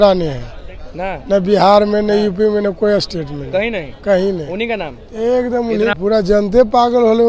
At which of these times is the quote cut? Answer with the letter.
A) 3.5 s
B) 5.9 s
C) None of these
B